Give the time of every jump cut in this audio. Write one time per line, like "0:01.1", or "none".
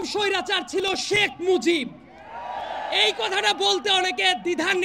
none